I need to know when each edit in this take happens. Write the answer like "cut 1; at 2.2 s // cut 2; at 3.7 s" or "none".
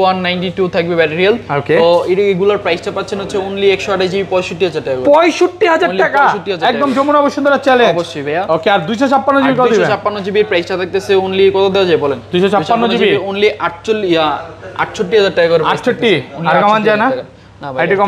none